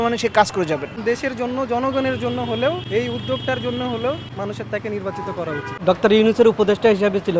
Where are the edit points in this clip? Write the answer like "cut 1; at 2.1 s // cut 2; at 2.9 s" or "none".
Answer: cut 1; at 1.0 s // cut 2; at 2.8 s // cut 3; at 4.3 s // cut 4; at 5.7 s

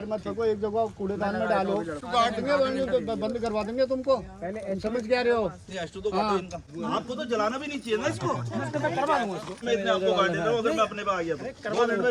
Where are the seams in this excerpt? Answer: cut 1; at 2.0 s // cut 2; at 6.6 s // cut 3; at 9.6 s

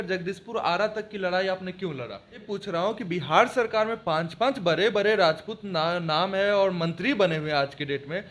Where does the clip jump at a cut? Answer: cut 1; at 2.5 s

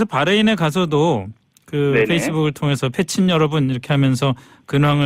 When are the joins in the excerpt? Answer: cut 1; at 1.8 s

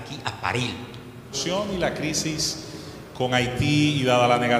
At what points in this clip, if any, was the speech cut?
cut 1; at 1.4 s

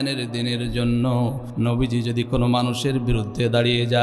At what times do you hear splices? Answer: cut 1; at 1.4 s

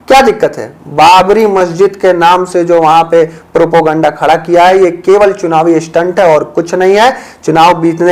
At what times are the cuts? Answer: none

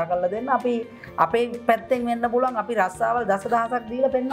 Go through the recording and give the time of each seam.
none

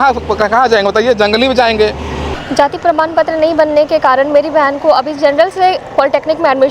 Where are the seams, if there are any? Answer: cut 1; at 2.3 s

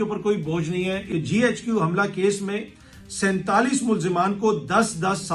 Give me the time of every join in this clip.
cut 1; at 1.1 s

